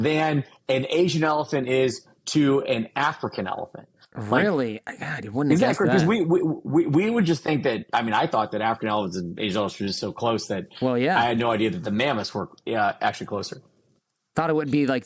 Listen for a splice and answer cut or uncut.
uncut